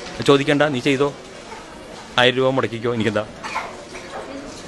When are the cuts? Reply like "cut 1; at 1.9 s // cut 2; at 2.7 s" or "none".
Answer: none